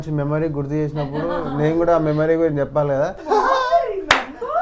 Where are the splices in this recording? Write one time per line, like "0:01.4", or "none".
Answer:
0:03.2